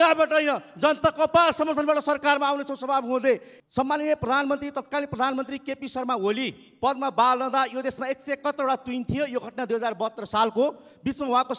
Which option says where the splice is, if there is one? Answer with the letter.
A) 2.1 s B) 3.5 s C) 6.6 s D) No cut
B